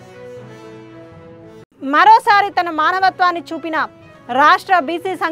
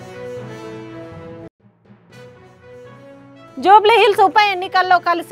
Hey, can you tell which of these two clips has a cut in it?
second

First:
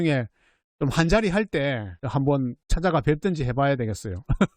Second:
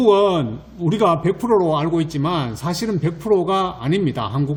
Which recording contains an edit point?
first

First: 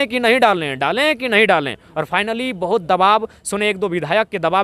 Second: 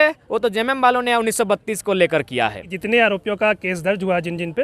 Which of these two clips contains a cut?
second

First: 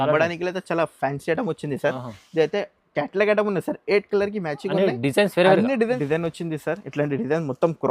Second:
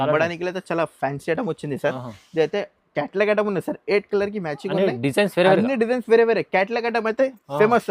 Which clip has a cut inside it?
first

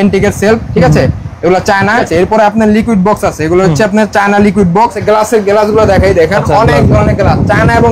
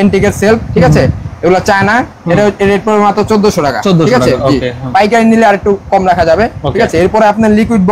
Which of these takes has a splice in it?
first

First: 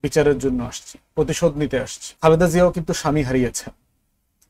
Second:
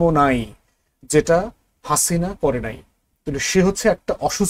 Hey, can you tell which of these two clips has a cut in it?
first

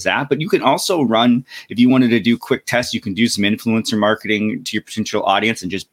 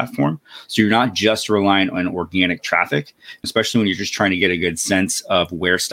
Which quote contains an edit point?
second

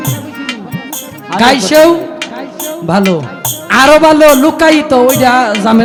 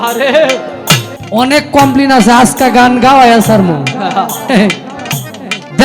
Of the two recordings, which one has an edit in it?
second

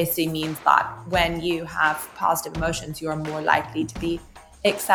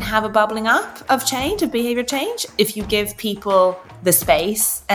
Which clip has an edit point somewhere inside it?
second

